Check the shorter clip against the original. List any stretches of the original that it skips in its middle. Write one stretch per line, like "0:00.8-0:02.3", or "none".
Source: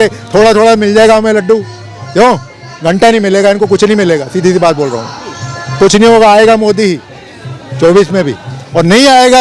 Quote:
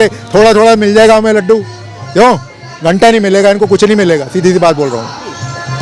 none